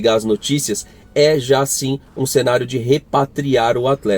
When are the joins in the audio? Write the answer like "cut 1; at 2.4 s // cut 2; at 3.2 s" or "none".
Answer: none